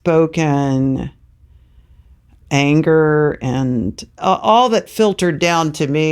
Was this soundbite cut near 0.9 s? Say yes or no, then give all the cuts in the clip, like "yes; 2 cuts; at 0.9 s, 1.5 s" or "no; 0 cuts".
no; 2 cuts; at 2.4 s, 4.2 s